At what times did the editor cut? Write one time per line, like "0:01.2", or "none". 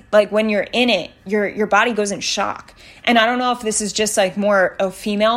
none

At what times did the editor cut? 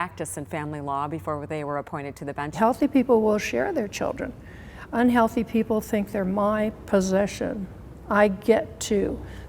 0:02.6

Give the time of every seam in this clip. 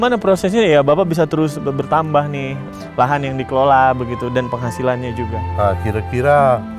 0:02.7

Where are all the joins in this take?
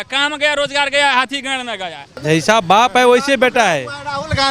0:02.1

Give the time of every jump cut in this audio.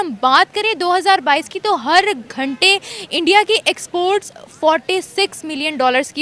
none

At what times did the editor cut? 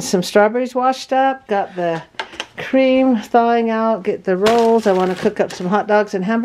none

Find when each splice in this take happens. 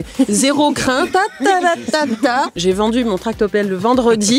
0:02.5

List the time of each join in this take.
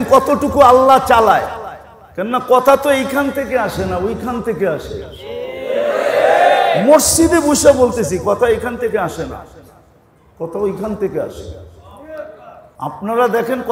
0:12.7

